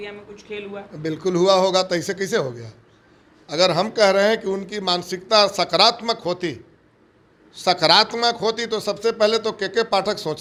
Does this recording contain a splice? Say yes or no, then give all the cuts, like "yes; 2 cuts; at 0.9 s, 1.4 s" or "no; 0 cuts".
no; 0 cuts